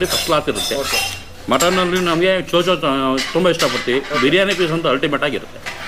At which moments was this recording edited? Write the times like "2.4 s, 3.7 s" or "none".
none